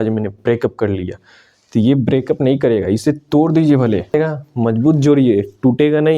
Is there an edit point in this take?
yes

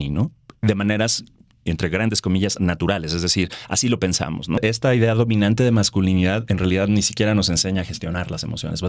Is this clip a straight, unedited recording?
no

